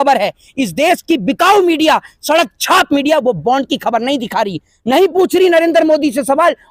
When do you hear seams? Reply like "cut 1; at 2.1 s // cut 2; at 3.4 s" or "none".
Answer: none